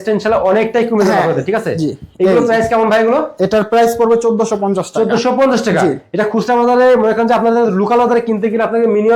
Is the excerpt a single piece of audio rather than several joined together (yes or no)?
yes